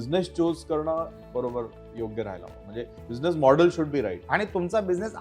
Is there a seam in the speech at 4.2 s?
yes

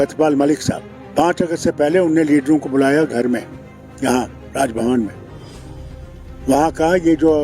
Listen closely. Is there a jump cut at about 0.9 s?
yes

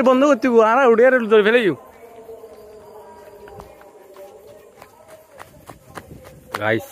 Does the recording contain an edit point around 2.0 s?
no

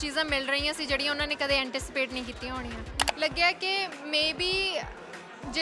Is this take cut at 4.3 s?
no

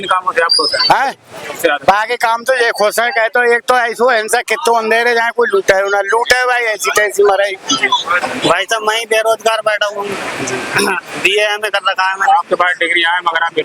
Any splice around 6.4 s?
no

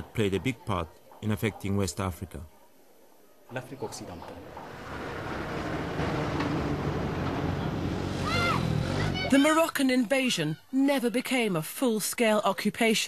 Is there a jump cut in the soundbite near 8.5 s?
yes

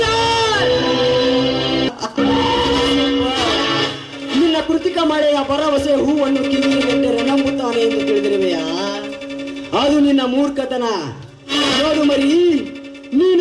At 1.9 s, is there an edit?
yes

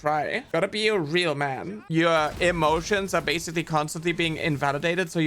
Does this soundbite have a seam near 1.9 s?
yes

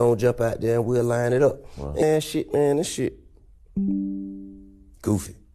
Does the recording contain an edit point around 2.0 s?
yes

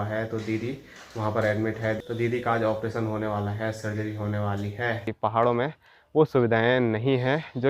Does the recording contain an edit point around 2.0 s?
yes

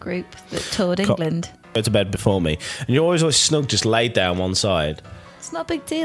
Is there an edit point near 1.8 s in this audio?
yes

